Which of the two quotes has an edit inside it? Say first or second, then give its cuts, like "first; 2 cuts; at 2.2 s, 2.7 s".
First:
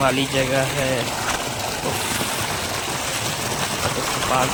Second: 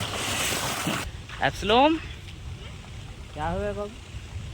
second; 1 cut; at 1.0 s